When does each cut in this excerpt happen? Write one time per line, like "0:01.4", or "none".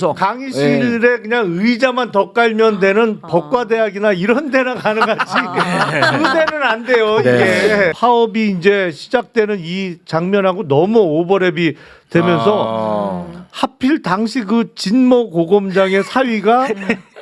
0:07.9